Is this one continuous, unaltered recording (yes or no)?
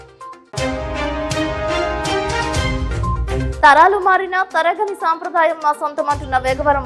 no